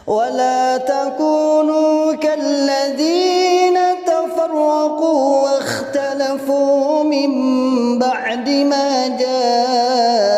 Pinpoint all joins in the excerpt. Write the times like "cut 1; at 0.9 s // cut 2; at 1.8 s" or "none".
none